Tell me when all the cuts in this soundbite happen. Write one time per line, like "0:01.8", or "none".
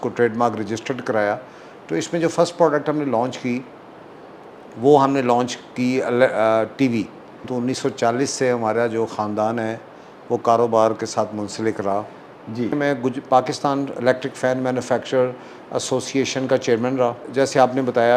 0:07.4
0:12.8
0:17.2